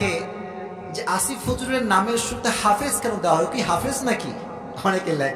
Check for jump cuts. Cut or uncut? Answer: uncut